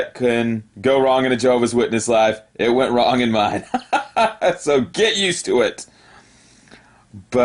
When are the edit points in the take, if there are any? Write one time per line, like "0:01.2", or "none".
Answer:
0:06.0